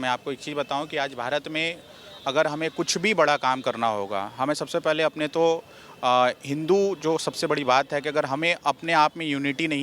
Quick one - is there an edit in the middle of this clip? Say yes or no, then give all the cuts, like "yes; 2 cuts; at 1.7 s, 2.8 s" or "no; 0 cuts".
no; 0 cuts